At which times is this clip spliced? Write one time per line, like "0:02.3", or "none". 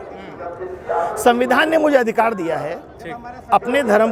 none